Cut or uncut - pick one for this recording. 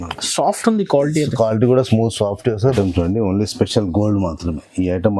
cut